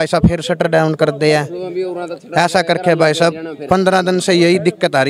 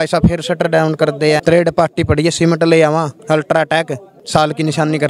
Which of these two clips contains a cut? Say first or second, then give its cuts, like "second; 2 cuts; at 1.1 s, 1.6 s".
second; 3 cuts; at 1.4 s, 3.2 s, 4.1 s